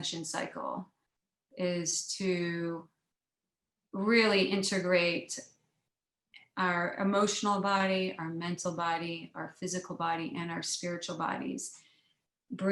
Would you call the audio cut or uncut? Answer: uncut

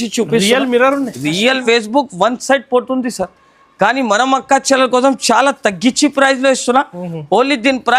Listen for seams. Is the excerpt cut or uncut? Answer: cut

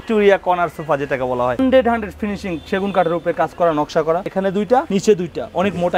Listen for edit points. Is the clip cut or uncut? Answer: cut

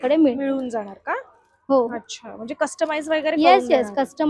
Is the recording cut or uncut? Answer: uncut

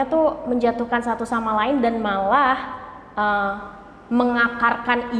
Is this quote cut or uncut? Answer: uncut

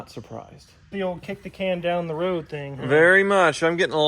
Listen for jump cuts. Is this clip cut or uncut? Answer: cut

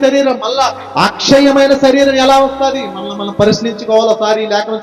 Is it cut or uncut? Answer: uncut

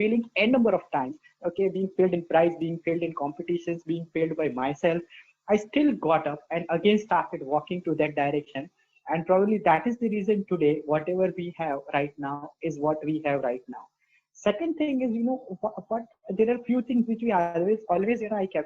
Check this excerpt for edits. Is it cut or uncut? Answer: uncut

